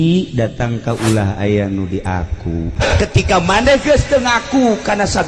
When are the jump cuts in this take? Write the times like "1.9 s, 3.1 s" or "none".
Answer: 2.7 s